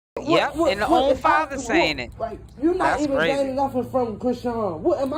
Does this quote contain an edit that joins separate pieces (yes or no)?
no